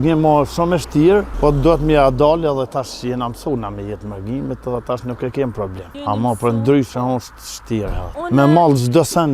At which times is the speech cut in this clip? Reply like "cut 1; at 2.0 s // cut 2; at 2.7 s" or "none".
cut 1; at 1.3 s // cut 2; at 5.9 s // cut 3; at 8.2 s